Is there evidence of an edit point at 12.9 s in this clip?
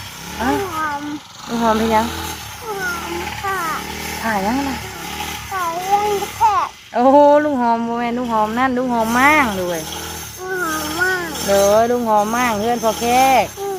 no; 0 cuts

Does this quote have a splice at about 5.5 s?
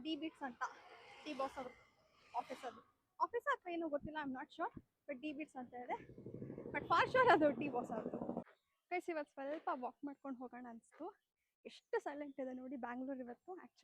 no; 1 cut; at 8.4 s

